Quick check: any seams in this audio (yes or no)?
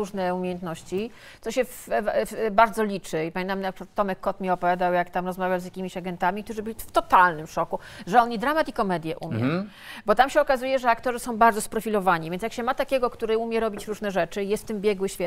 no